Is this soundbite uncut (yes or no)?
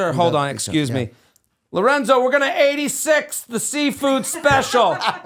yes